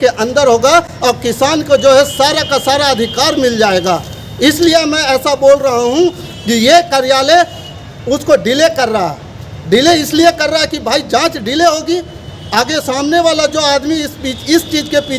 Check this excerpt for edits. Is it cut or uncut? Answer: uncut